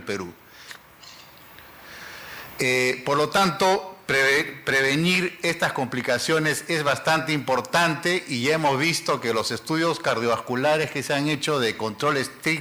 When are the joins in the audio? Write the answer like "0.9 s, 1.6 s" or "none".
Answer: 9.5 s